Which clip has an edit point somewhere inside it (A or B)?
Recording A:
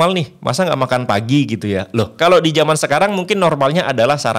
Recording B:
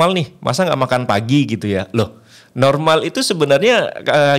A